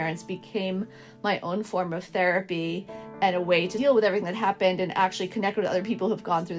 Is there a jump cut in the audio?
yes; 1 cut; at 3.7 s

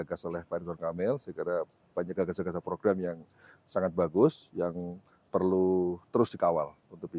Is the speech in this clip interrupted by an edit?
no; 0 cuts

